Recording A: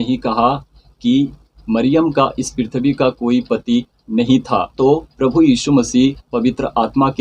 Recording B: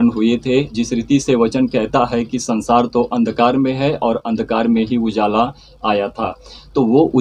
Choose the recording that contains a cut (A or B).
A